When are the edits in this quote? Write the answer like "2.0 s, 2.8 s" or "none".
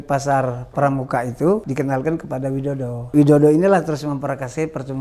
1.7 s, 3.1 s